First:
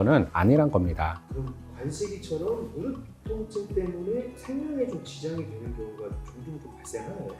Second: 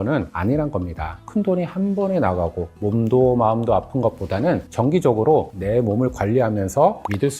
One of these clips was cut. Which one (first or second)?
second